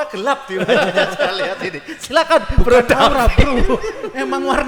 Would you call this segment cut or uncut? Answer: uncut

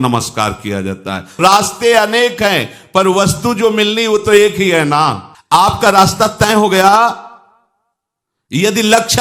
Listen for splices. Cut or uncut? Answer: cut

